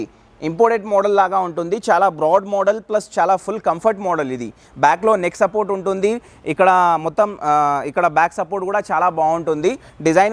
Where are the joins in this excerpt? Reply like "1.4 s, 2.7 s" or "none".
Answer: none